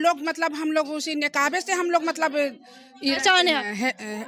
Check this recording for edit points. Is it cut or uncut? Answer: uncut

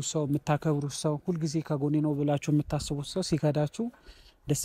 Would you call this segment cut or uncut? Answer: uncut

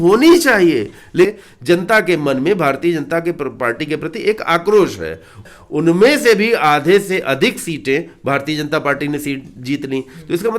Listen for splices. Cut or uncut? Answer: cut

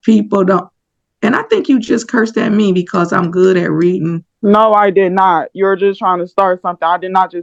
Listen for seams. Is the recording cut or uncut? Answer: uncut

